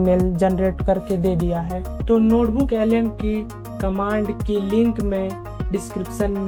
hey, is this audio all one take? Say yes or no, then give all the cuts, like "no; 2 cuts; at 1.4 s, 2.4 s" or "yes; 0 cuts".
yes; 0 cuts